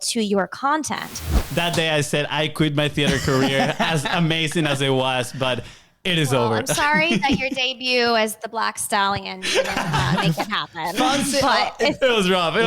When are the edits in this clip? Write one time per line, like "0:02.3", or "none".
0:01.4